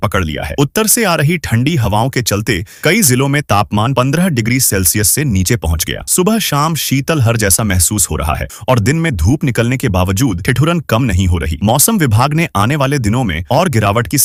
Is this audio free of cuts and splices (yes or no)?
yes